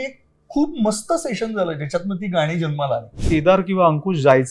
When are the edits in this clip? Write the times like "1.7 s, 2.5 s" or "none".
3.1 s